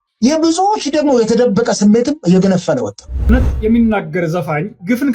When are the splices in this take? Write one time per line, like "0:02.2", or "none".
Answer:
0:03.2